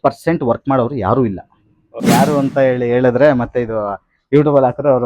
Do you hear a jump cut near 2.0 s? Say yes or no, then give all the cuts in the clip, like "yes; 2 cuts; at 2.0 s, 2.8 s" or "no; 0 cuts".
yes; 1 cut; at 2.0 s